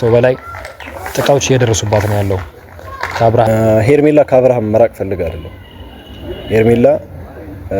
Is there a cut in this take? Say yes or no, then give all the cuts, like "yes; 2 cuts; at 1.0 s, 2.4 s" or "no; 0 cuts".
yes; 1 cut; at 3.5 s